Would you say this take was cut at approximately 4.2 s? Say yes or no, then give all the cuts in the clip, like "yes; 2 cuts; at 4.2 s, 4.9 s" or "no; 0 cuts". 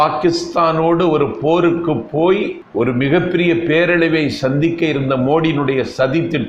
no; 1 cut; at 2.6 s